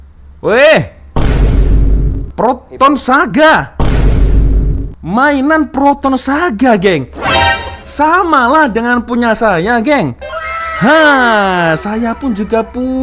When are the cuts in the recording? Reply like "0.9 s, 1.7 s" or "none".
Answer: none